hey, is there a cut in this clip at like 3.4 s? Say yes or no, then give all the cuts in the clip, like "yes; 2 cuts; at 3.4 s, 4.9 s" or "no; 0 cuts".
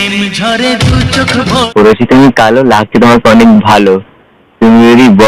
no; 1 cut; at 1.7 s